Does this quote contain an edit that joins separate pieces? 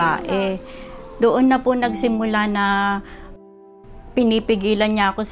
no; 0 cuts

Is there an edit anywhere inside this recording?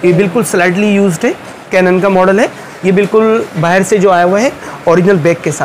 yes; 1 cut; at 1.5 s

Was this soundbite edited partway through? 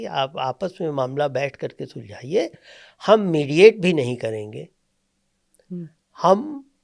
no; 0 cuts

